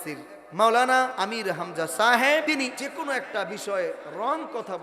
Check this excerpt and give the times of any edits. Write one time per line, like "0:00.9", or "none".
0:01.1
0:02.6